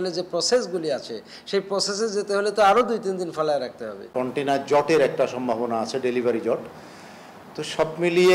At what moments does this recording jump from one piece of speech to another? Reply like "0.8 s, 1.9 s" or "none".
none